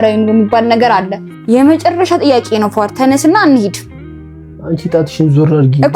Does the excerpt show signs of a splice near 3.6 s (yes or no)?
no